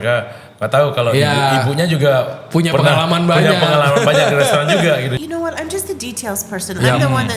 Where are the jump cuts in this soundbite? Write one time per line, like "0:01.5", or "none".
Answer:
0:05.1